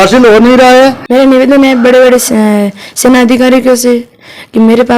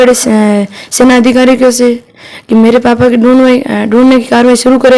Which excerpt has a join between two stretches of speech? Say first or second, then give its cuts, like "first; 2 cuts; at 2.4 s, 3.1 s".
first; 1 cut; at 1.0 s